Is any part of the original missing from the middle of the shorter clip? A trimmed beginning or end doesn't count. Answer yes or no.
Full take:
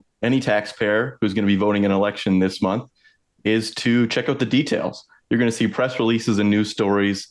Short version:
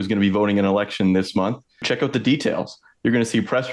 yes